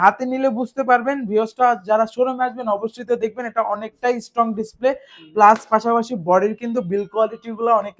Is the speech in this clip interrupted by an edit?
no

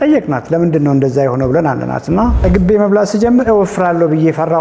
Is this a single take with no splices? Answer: no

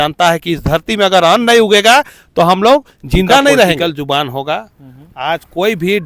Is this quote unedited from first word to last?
no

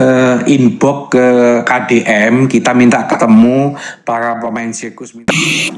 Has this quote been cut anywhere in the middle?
yes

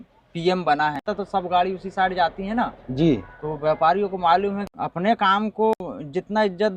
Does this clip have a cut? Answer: yes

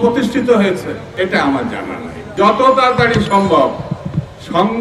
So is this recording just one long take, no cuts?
no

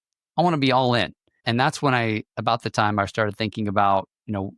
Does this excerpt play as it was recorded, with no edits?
no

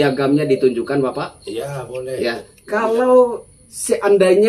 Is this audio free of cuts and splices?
no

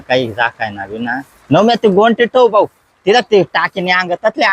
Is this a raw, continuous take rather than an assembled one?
no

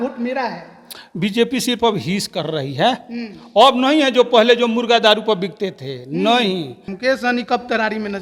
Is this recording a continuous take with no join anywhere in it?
no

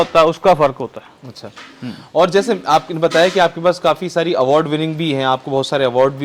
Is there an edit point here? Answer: no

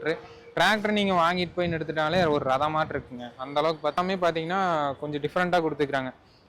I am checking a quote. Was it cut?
yes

